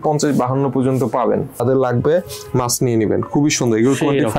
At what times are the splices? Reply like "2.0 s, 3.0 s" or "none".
1.6 s